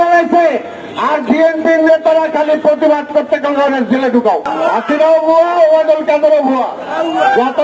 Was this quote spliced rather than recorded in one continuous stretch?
yes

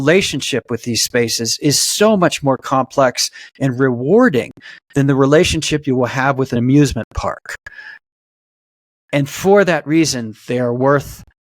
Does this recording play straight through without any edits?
no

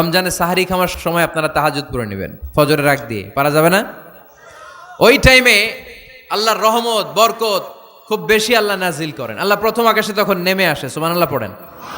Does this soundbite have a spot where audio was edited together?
yes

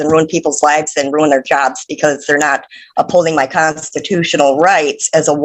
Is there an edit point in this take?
no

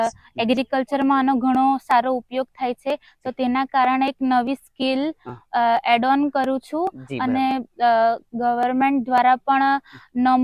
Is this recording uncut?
yes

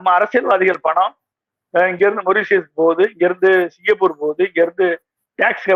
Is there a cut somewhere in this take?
no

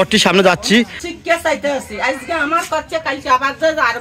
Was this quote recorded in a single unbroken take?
no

